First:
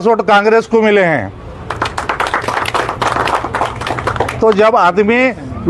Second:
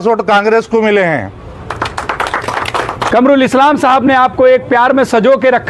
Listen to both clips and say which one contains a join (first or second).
second